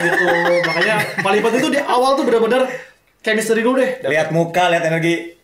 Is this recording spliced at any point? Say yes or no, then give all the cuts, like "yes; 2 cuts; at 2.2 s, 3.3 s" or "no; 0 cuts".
no; 0 cuts